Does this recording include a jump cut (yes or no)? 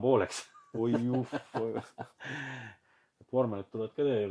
yes